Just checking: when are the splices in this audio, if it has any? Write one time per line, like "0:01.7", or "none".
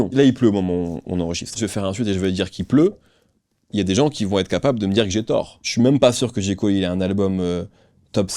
0:01.6
0:05.6